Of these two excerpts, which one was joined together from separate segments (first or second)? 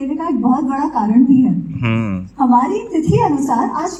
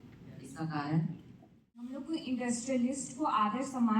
second